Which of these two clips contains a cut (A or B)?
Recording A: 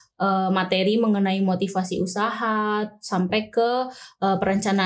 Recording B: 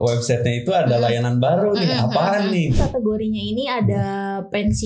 B